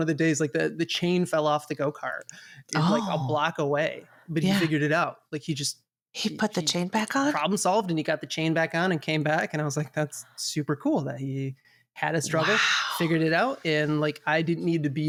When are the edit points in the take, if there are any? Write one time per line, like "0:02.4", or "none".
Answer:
none